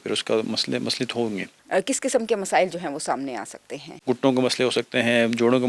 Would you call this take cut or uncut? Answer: cut